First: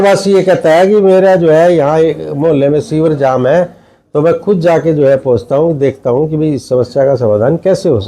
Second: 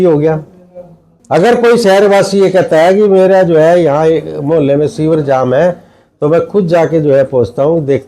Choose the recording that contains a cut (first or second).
second